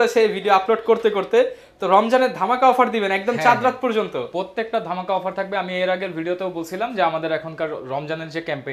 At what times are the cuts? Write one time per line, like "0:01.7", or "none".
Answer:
none